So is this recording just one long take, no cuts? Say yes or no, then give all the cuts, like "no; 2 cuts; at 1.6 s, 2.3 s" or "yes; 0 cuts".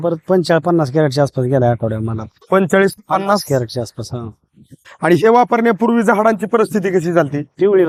yes; 0 cuts